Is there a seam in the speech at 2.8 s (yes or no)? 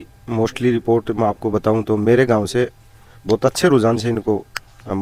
no